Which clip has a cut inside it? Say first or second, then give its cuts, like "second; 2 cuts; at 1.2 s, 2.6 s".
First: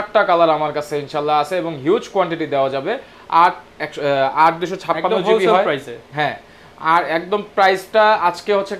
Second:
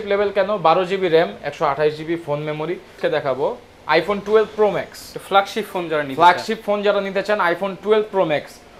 second; 1 cut; at 3.0 s